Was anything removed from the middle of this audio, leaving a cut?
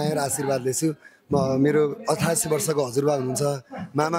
no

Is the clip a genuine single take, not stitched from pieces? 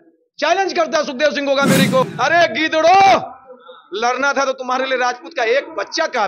no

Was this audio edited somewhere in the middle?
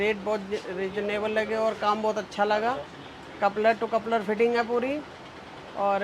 no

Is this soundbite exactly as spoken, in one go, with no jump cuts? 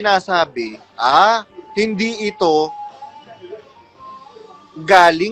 yes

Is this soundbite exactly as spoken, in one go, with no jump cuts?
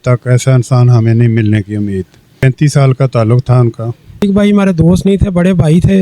no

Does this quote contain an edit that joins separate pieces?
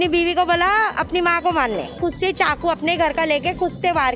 yes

